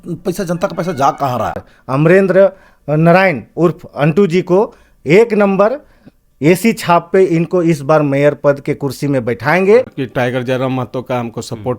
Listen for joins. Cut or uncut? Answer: cut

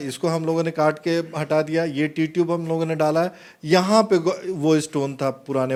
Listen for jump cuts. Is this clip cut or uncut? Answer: uncut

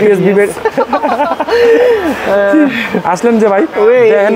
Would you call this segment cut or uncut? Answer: uncut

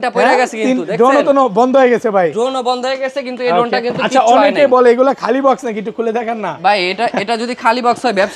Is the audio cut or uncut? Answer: uncut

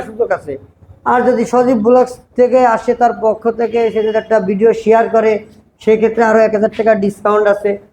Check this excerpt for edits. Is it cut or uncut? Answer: uncut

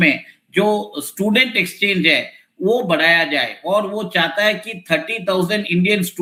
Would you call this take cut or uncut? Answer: uncut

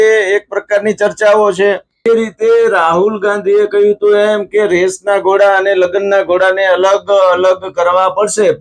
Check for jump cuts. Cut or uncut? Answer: cut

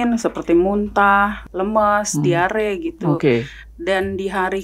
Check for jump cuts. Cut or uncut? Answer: cut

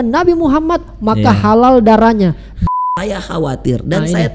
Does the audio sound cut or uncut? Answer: cut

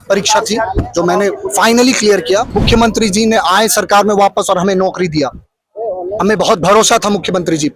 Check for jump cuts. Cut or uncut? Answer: cut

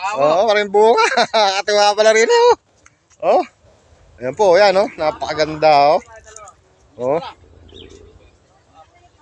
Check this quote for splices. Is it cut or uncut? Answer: uncut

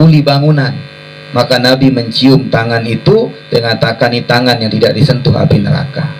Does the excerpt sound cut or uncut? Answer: uncut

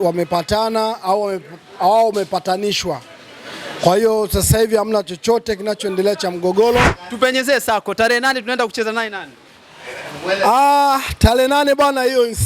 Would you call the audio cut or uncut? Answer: cut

